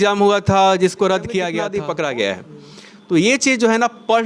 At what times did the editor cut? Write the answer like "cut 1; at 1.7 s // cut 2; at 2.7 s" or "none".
cut 1; at 1.6 s